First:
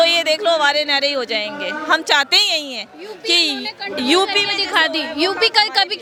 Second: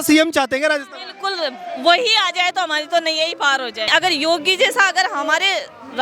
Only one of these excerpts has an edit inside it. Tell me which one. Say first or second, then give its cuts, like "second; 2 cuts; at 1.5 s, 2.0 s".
second; 1 cut; at 3.9 s